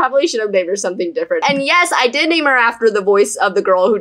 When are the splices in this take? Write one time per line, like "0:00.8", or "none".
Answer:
0:01.4

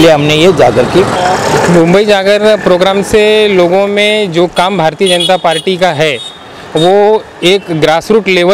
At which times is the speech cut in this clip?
0:01.1

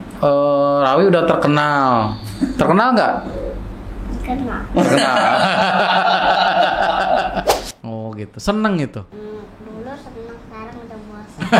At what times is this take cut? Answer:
0:07.6
0:09.1

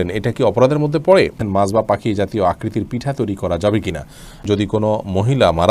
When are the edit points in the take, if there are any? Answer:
0:01.4
0:04.4

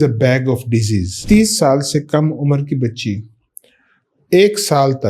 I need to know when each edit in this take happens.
0:01.2

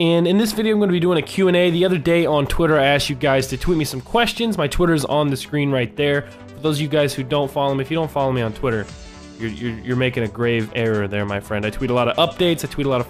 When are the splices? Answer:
none

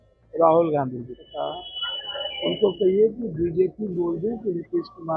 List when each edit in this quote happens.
0:01.3

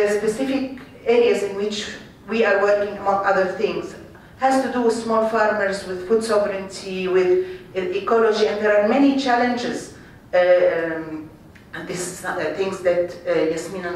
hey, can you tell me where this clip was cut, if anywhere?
0:06.4

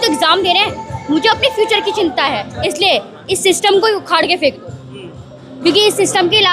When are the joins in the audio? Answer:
0:02.5

